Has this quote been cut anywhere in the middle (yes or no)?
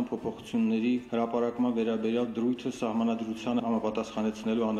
no